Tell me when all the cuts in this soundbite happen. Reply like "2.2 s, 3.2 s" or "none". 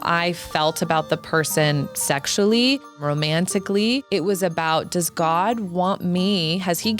3.0 s, 4.0 s